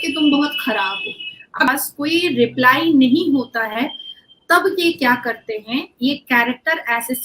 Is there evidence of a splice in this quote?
yes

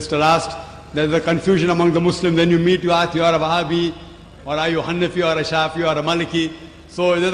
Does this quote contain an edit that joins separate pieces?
no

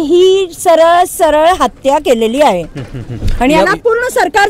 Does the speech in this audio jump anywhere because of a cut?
no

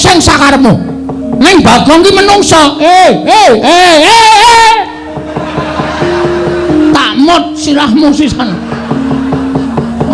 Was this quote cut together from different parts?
no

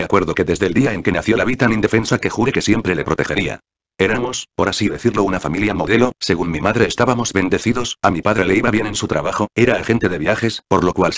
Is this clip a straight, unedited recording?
yes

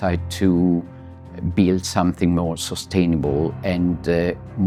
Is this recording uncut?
yes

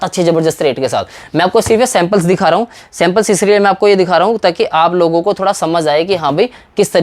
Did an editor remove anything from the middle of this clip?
no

